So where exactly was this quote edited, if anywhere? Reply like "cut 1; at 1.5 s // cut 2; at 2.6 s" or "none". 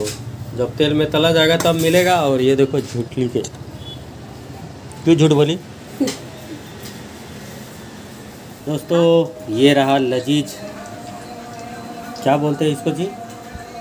none